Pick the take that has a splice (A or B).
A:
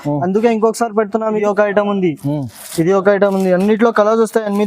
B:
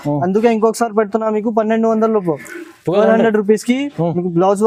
A